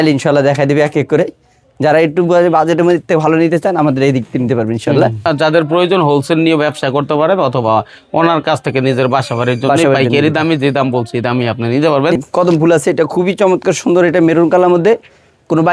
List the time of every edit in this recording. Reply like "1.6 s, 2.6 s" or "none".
5.2 s, 12.2 s